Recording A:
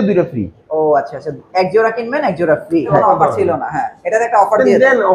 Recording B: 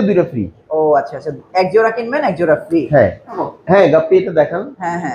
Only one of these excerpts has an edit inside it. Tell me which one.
A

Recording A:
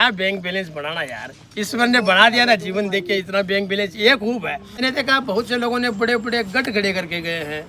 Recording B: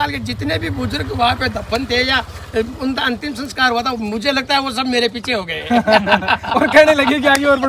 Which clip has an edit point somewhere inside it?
A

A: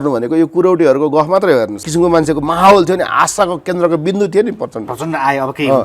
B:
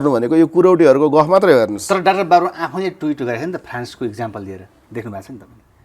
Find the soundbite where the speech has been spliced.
A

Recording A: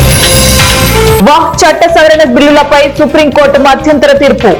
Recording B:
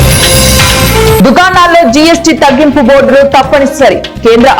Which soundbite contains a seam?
B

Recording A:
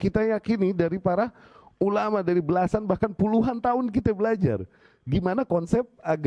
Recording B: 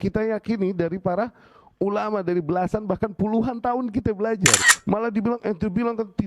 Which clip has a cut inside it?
B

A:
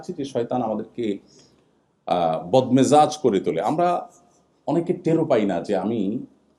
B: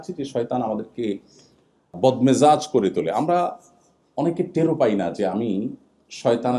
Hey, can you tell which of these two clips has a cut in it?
B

